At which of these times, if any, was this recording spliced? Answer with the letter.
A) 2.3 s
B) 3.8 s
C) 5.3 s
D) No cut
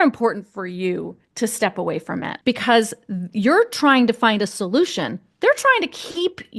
A